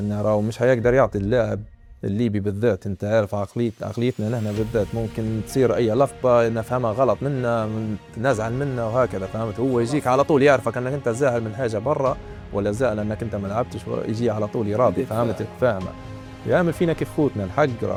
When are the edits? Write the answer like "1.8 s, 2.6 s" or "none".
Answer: none